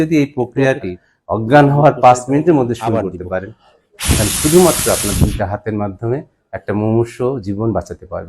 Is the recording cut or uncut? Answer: cut